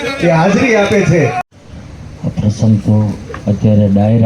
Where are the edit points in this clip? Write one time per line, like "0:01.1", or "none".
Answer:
0:01.5